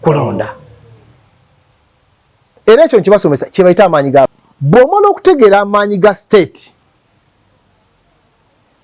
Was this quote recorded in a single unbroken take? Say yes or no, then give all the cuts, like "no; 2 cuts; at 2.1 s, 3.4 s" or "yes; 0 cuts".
no; 1 cut; at 4.5 s